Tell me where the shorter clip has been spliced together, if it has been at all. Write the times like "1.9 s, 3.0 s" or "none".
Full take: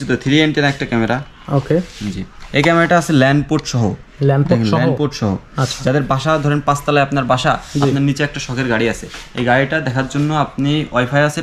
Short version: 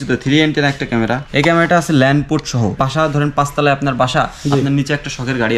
1.2 s, 2.8 s

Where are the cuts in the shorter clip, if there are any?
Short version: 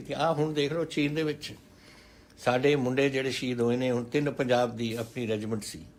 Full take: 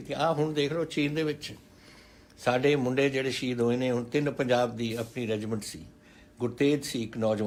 none

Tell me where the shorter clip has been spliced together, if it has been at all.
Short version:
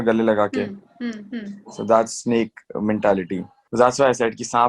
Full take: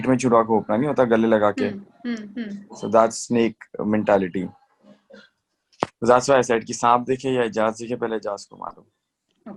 3.6 s

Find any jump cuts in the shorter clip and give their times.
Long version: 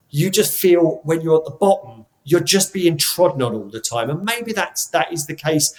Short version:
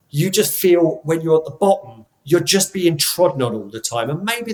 none

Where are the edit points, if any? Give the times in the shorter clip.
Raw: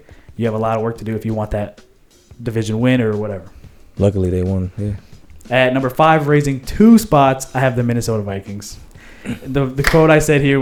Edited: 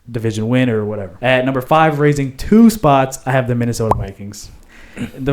1.1 s

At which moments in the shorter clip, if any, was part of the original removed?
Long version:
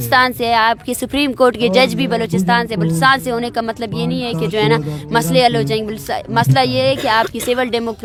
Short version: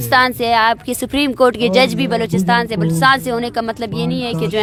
none

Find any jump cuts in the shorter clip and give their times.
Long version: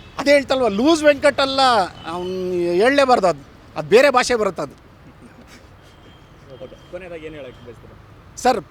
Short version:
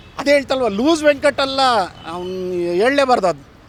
none

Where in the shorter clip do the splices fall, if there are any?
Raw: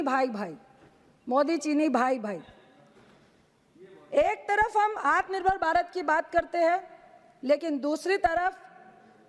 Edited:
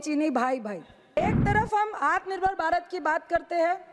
1.2 s

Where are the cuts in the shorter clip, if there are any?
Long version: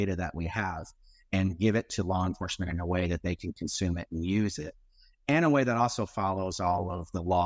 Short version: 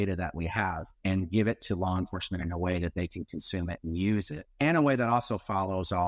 0.9 s, 4.4 s

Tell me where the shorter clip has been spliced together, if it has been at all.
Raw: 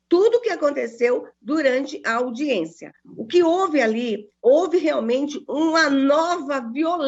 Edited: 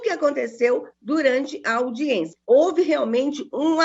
2.3 s

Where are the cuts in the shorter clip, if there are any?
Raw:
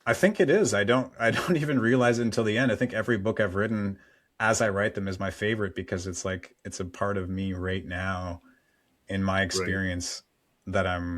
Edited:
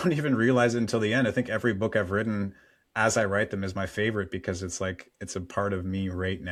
none

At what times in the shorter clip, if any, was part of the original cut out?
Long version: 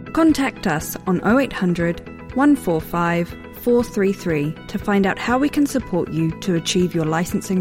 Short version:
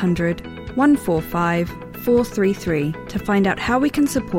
none

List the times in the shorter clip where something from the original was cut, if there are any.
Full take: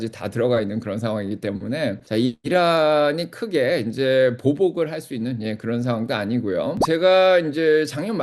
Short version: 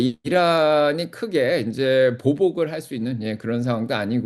none

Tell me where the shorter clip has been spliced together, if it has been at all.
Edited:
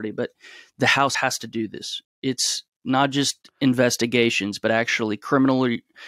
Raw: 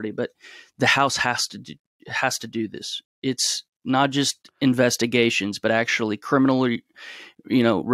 1.2 s

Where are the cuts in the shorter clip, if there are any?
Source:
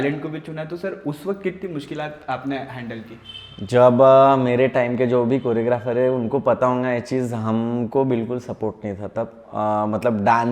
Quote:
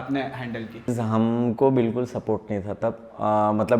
1.0 s

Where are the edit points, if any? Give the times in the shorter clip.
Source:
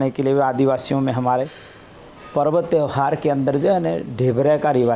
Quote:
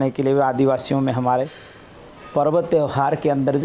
none

